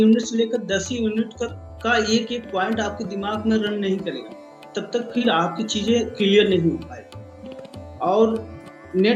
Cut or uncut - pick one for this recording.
uncut